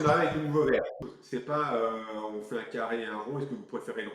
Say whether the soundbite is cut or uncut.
cut